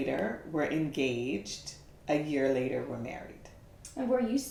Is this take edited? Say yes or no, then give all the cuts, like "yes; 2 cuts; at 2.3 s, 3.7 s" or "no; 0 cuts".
no; 0 cuts